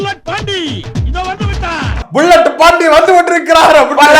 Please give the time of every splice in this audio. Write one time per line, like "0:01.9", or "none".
none